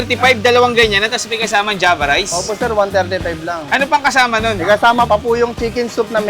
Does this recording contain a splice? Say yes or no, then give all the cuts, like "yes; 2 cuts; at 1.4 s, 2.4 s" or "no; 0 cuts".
yes; 1 cut; at 5.1 s